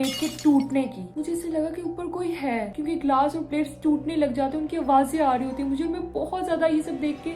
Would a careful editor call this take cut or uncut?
uncut